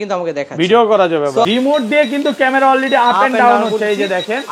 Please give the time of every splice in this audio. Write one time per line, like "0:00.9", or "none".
0:01.4